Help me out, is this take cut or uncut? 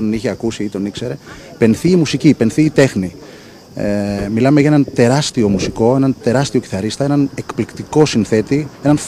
cut